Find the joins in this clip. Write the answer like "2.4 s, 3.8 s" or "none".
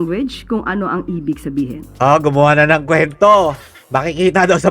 none